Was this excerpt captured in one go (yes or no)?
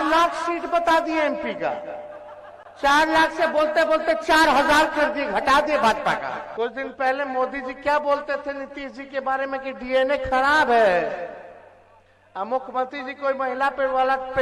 no